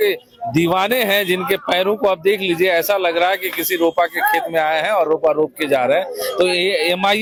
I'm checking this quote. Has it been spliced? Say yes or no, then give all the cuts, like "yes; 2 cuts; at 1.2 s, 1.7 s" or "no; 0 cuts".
no; 0 cuts